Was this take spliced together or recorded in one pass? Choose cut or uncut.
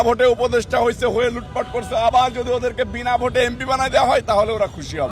uncut